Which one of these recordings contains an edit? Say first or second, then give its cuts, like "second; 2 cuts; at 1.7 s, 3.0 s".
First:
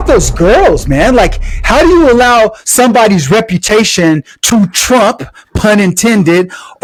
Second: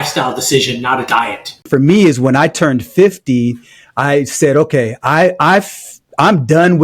second; 1 cut; at 1.7 s